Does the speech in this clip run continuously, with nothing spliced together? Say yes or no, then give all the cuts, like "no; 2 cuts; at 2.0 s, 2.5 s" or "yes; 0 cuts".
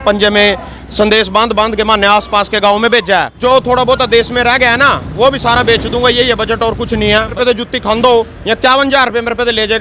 no; 2 cuts; at 3.3 s, 7.3 s